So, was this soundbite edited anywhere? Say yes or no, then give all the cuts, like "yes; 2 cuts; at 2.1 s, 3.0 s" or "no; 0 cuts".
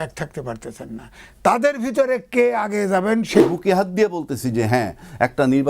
yes; 1 cut; at 3.4 s